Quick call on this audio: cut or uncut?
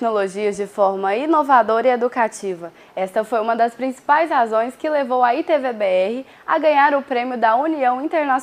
uncut